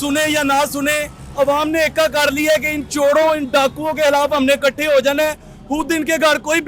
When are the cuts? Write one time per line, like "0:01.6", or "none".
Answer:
none